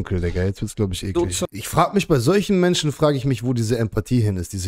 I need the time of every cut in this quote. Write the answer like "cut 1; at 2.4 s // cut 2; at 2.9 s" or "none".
cut 1; at 1.5 s